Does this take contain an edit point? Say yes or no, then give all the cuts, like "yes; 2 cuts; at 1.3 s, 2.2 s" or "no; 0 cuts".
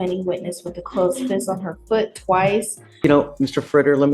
yes; 1 cut; at 3.0 s